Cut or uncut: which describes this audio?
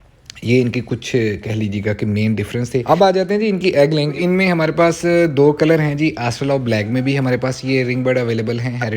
cut